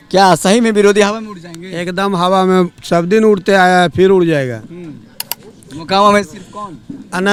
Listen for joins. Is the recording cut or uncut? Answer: uncut